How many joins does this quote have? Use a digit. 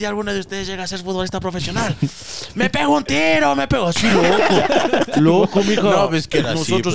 0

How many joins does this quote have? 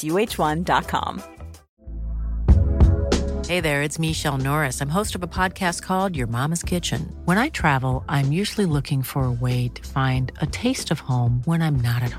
1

